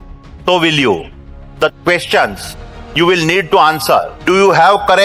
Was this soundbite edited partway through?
yes; 2 cuts; at 1.2 s, 4.1 s

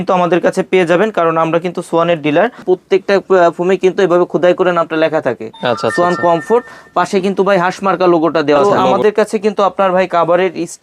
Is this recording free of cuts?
no; 2 cuts; at 2.6 s, 8.9 s

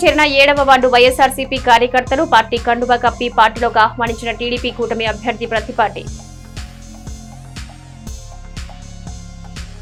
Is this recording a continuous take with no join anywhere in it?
yes; 0 cuts

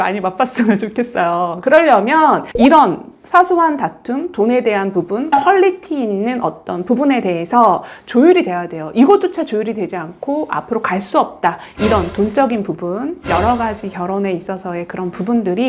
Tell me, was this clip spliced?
yes; 1 cut; at 11.6 s

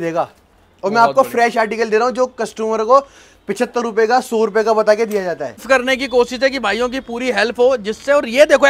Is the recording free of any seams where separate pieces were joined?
no; 1 cut; at 5.6 s

